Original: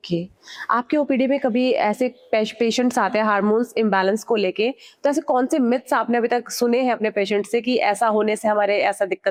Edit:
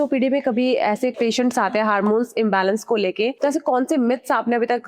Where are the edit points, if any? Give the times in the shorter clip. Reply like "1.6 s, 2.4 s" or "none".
1.1 s, 3.4 s